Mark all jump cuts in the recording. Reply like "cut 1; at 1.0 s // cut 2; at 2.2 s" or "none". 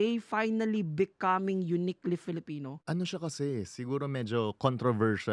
none